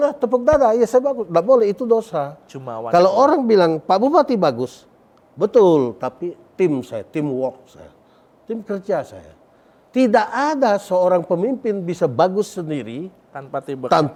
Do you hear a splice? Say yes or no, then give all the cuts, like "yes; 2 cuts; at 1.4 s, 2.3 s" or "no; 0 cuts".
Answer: no; 0 cuts